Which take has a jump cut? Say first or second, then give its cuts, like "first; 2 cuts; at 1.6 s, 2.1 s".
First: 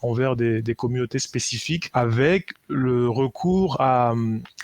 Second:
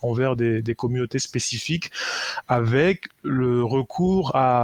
first; 1 cut; at 1.9 s